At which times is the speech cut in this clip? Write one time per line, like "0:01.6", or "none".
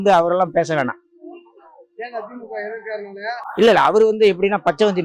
none